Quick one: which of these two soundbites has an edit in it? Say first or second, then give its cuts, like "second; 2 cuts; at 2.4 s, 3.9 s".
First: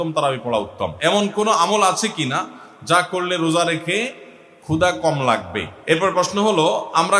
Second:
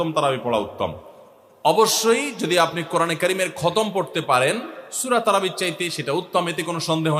first; 2 cuts; at 1.0 s, 6.0 s